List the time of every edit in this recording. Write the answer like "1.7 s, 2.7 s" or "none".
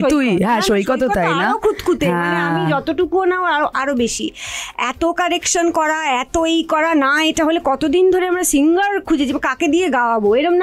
none